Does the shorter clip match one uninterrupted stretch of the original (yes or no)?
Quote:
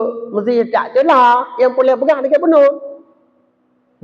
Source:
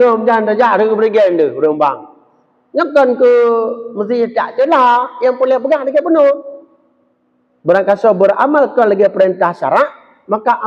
yes